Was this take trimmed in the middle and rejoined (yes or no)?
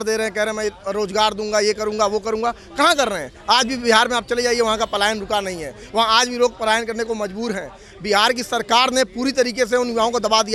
no